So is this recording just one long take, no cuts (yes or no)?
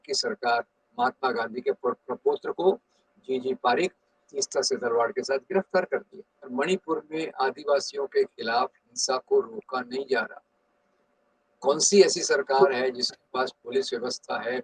no